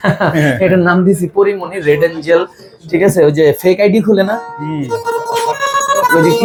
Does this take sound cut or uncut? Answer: uncut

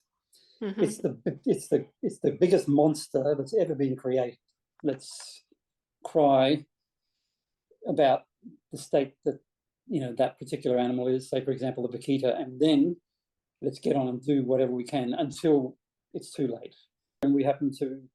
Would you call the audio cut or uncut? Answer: cut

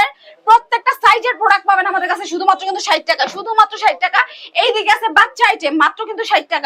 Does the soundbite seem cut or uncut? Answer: uncut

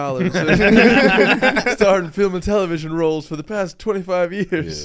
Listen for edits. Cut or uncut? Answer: uncut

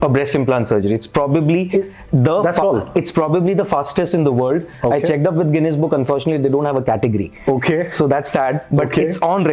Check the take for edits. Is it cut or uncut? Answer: uncut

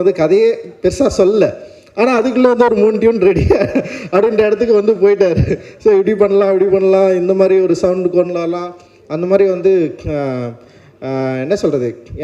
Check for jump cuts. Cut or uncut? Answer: uncut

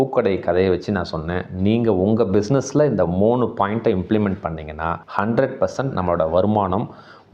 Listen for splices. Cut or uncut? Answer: uncut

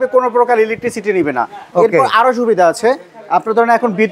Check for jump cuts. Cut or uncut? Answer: uncut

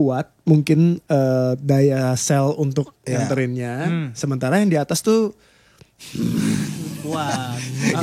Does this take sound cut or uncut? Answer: uncut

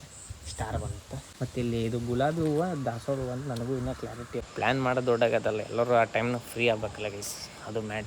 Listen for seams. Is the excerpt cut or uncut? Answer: cut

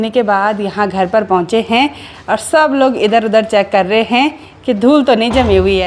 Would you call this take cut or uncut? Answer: uncut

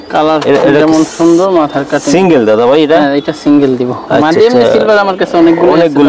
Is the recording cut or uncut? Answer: uncut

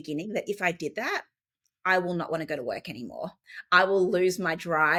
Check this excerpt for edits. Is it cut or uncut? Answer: uncut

